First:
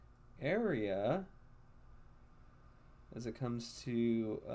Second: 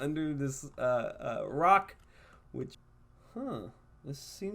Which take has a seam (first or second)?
second